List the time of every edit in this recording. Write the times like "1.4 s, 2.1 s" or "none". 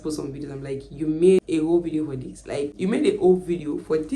2.8 s